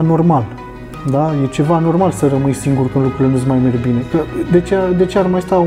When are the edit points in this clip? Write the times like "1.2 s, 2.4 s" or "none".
none